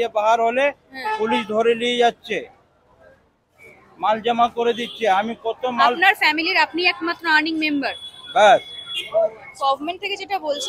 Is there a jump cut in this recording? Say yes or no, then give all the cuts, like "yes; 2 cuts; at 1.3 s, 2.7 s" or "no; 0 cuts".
yes; 1 cut; at 9.6 s